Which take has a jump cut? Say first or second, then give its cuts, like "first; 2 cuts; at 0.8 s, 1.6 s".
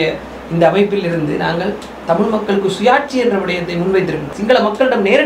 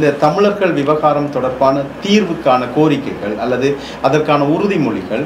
first; 1 cut; at 4.3 s